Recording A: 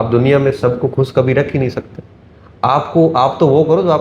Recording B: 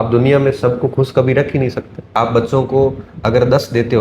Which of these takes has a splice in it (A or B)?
B